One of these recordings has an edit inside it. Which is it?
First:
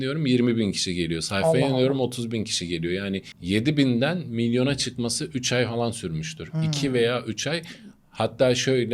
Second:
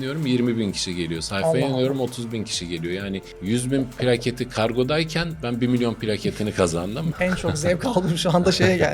second; 2 cuts; at 3.3 s, 7.1 s

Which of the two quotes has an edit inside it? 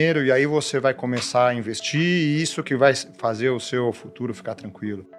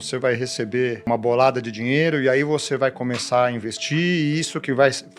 second; 1 cut; at 1.1 s

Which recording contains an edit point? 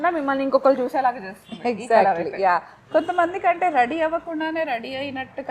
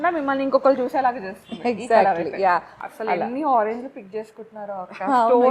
second; 1 cut; at 2.8 s

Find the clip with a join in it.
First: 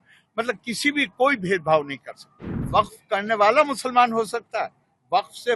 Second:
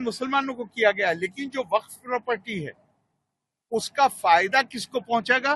first; 1 cut; at 2.6 s

